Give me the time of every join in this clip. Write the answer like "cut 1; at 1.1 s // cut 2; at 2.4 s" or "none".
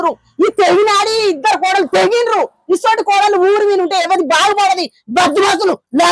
none

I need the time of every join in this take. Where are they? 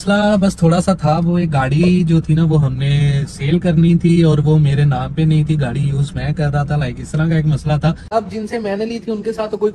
cut 1; at 8.0 s

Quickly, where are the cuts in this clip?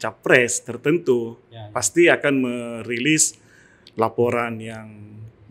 none

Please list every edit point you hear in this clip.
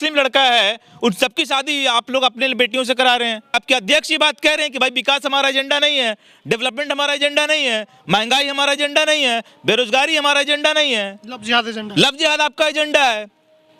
cut 1; at 3.5 s

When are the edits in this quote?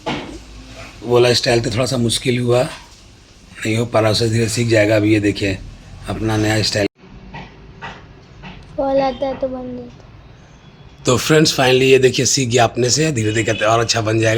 cut 1; at 6.9 s

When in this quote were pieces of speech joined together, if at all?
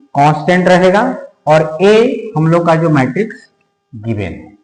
none

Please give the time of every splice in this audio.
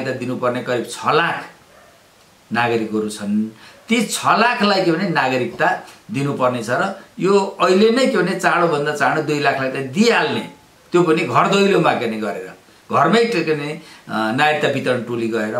none

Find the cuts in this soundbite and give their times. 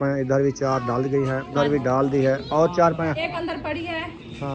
cut 1; at 1.5 s // cut 2; at 3.3 s

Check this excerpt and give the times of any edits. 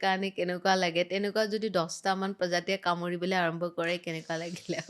none

